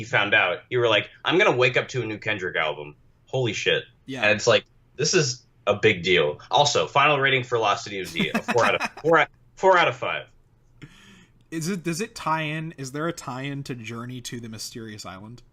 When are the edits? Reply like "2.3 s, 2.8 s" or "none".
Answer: 2.2 s